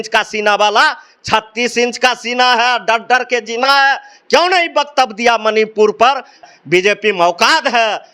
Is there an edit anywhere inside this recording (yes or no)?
yes